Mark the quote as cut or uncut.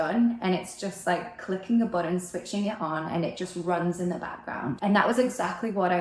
cut